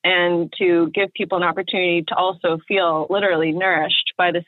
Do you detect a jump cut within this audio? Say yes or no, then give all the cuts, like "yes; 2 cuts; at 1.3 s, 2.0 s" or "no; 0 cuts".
no; 0 cuts